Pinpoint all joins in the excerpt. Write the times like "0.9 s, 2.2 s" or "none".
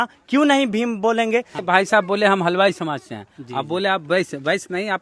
1.6 s